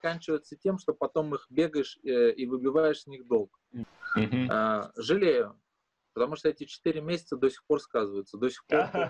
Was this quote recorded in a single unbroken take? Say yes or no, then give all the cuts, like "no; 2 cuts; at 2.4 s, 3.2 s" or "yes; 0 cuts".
no; 1 cut; at 3.7 s